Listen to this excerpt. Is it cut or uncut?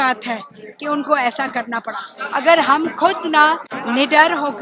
cut